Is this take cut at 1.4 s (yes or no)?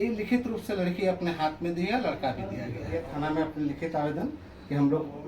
no